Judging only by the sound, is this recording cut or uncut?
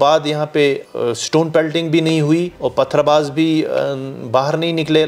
cut